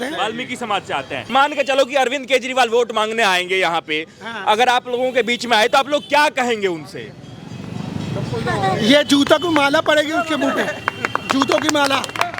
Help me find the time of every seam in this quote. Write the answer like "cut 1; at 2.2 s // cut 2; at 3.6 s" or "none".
cut 1; at 1.3 s